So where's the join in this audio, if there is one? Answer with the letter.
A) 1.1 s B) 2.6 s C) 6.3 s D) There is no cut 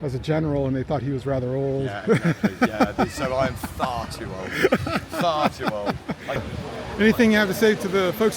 C